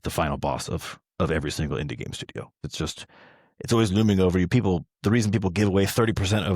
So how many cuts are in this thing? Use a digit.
1